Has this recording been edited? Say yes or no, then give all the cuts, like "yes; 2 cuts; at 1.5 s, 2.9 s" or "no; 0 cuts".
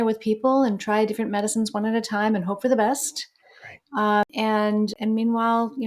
yes; 1 cut; at 4.9 s